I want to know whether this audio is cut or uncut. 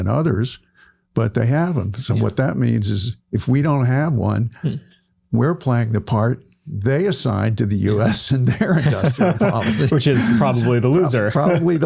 uncut